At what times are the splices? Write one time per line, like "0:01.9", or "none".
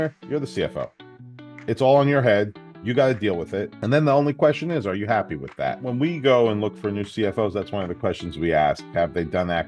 0:03.7
0:05.8